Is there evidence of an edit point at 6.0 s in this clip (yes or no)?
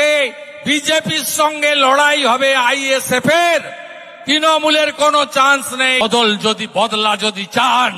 yes